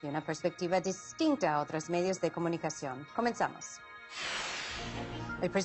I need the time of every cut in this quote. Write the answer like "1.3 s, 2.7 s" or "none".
none